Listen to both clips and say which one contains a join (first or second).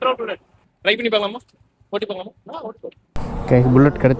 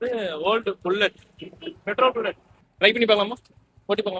first